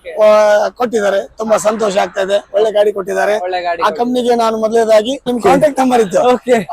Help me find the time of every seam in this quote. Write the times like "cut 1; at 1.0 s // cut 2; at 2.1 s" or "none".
cut 1; at 5.3 s